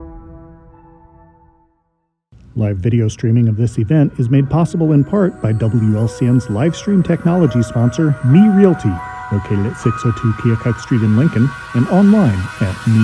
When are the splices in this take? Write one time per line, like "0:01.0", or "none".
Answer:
0:02.6